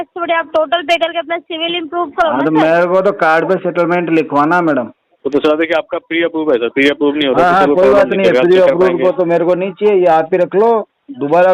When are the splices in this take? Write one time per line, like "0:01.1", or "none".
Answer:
0:05.0